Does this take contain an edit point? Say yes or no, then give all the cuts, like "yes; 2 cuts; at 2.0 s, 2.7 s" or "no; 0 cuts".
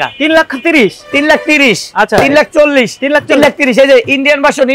no; 0 cuts